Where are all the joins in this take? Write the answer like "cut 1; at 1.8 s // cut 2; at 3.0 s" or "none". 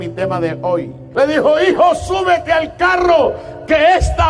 cut 1; at 1.0 s